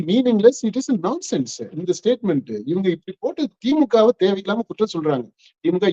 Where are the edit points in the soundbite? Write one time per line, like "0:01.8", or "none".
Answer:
none